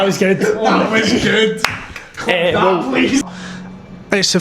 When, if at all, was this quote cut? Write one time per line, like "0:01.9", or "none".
0:03.3